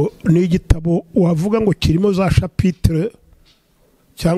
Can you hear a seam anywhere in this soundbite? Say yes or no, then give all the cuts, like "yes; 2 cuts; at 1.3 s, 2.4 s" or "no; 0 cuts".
no; 0 cuts